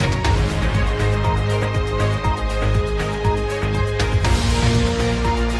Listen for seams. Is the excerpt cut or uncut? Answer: cut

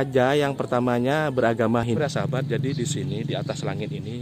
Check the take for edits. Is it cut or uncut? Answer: cut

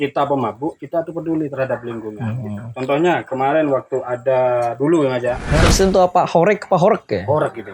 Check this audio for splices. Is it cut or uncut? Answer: cut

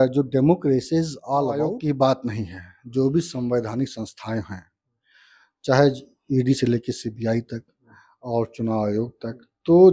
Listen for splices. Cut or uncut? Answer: cut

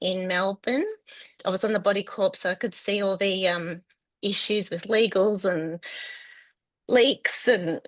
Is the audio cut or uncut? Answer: cut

